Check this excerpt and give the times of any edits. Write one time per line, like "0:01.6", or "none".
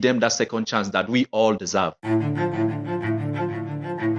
0:02.0